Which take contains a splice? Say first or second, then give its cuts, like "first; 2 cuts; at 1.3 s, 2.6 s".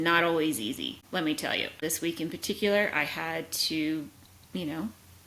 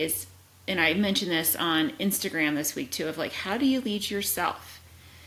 first; 2 cuts; at 1.0 s, 1.8 s